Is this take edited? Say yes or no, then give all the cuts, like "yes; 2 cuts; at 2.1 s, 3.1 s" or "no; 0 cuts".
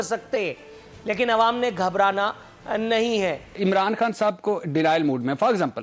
yes; 1 cut; at 3.6 s